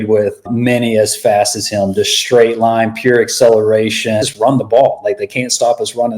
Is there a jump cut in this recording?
yes; 1 cut; at 4.3 s

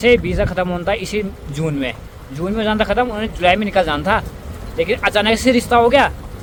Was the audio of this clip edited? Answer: no; 0 cuts

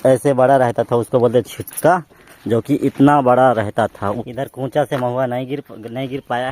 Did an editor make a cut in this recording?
yes; 1 cut; at 4.2 s

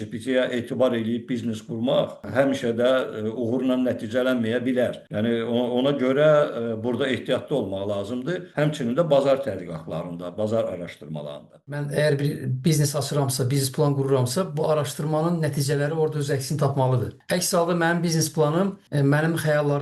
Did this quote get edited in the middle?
yes; 6 cuts; at 2.2 s, 5.0 s, 8.5 s, 11.8 s, 17.1 s, 18.8 s

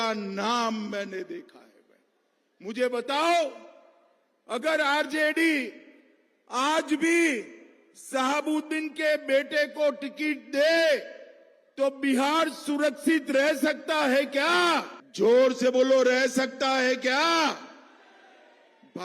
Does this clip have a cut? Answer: yes; 1 cut; at 15.0 s

